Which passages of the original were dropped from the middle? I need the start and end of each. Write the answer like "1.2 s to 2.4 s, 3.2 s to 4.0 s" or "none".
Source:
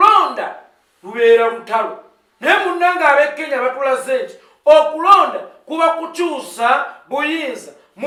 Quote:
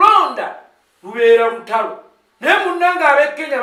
none